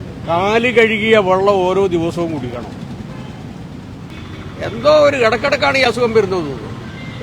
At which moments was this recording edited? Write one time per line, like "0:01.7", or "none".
0:04.1